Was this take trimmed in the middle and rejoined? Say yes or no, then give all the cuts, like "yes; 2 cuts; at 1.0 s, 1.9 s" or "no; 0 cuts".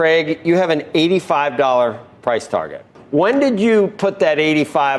yes; 1 cut; at 3.0 s